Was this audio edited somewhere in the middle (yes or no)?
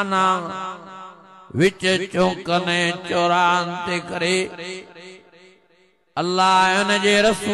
no